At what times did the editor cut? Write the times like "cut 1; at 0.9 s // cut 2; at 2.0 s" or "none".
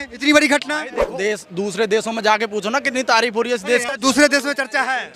cut 1; at 1.1 s // cut 2; at 3.9 s